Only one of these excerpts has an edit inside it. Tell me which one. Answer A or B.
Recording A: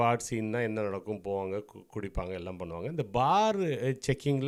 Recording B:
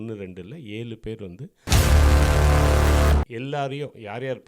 B